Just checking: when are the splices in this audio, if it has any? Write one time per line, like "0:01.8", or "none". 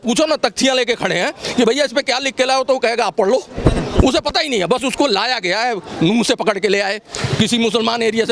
none